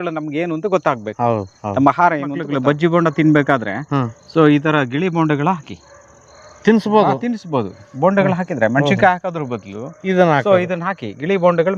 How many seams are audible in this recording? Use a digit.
1